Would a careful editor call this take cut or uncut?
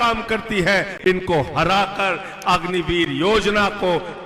cut